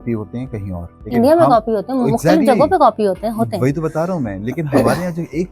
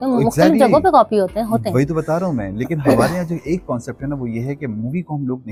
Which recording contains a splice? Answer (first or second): first